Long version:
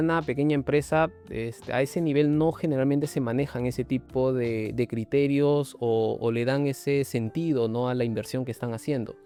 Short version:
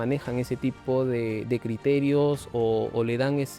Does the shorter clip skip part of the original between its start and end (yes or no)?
no